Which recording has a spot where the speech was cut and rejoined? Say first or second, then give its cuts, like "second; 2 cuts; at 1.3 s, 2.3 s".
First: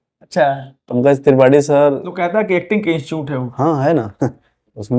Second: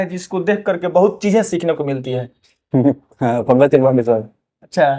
first; 1 cut; at 2.2 s